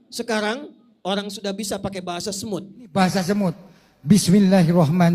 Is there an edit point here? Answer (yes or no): yes